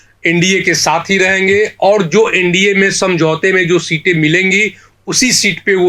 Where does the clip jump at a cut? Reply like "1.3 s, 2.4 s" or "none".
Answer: none